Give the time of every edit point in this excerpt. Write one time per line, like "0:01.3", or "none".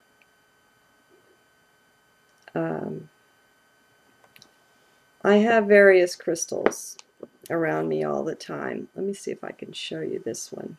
none